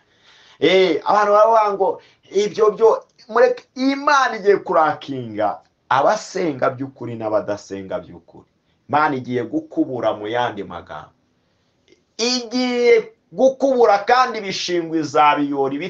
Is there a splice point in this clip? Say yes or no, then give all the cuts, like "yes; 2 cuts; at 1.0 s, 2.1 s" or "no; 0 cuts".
no; 0 cuts